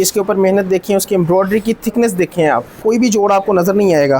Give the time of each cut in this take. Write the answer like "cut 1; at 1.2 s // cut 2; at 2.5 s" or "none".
cut 1; at 2.8 s